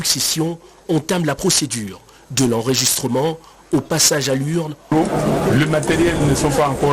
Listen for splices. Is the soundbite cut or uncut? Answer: cut